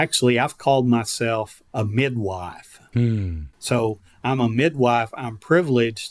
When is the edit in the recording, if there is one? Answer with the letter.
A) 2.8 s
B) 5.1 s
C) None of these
C